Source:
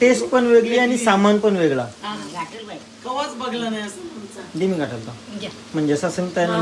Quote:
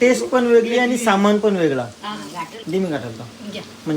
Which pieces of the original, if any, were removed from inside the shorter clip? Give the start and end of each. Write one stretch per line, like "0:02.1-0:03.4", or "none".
0:02.6-0:04.4